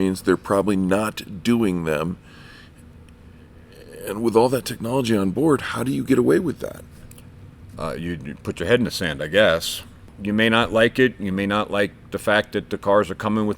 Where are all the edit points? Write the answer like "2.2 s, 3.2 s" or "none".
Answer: 10.1 s